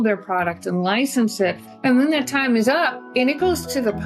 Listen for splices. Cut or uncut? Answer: cut